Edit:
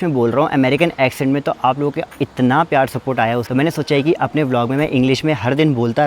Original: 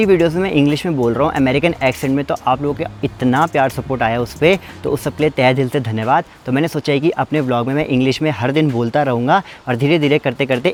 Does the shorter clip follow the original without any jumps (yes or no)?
no